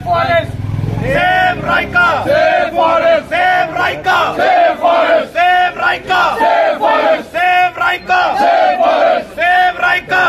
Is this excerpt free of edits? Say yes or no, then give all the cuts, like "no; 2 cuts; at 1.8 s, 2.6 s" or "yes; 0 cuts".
yes; 0 cuts